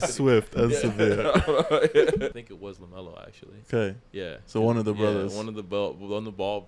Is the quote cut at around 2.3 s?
yes; 1 cut; at 2.3 s

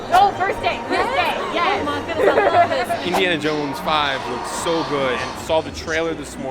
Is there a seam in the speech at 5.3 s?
yes; 2 cuts; at 3.1 s, 5.3 s

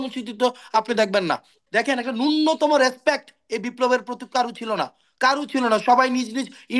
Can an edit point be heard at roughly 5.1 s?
no; 1 cut; at 1.6 s

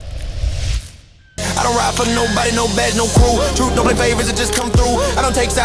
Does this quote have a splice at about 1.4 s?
yes; 1 cut; at 1.4 s

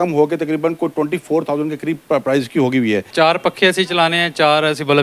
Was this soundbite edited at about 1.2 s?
no; 1 cut; at 3.1 s

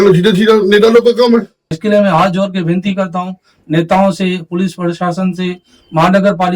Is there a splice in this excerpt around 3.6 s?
no; 1 cut; at 1.6 s

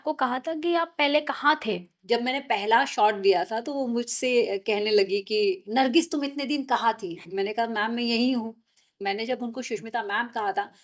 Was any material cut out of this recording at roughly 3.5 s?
no; 4 cuts; at 1.9 s, 5.6 s, 7.3 s, 8.9 s

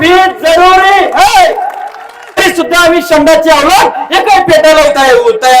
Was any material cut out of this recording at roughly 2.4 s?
yes; 1 cut; at 2.4 s

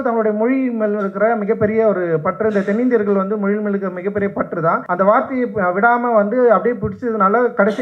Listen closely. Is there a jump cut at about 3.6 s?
no; 1 cut; at 4.8 s

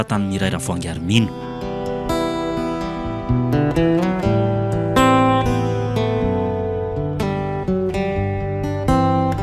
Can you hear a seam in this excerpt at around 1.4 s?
yes; 1 cut; at 1.4 s

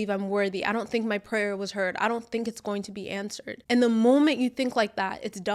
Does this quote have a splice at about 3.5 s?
yes; 1 cut; at 3.5 s

